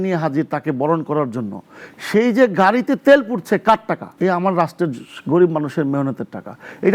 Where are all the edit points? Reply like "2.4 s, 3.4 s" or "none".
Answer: 4.1 s